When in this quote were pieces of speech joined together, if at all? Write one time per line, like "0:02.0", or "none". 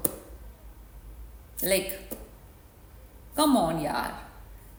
none